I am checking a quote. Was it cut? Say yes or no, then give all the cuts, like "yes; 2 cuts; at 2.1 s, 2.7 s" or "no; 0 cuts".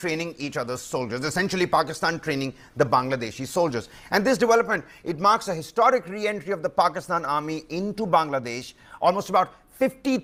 no; 0 cuts